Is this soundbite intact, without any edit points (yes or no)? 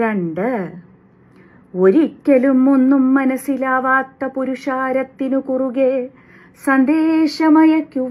yes